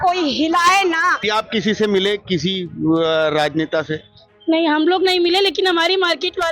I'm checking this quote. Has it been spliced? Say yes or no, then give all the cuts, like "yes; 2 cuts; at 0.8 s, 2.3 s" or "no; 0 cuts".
yes; 1 cut; at 1.2 s